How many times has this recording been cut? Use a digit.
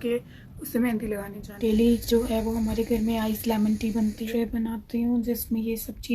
2